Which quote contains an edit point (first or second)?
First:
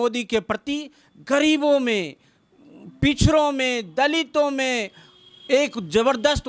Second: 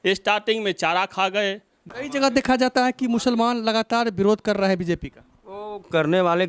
second